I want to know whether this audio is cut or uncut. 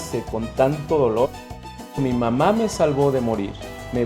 cut